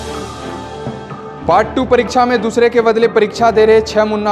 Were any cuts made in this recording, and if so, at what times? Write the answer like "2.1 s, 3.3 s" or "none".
1.1 s